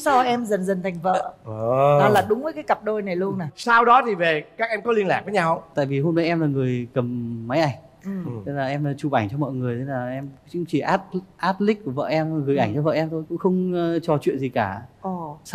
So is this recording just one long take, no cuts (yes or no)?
yes